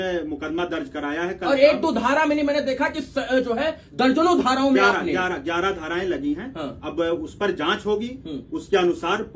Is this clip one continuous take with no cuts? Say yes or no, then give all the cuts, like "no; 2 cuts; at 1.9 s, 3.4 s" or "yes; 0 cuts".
yes; 0 cuts